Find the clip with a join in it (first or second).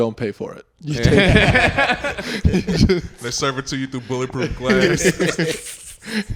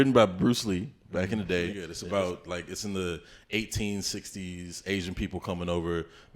second